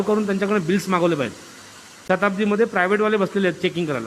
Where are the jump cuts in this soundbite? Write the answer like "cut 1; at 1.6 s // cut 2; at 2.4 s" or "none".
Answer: cut 1; at 1.9 s